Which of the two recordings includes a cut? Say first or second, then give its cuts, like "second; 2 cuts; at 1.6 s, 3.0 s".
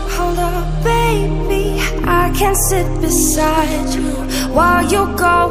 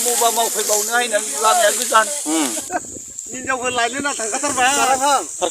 second; 1 cut; at 2.6 s